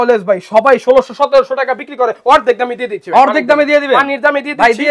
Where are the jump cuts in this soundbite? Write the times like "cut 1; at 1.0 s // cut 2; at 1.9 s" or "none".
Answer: none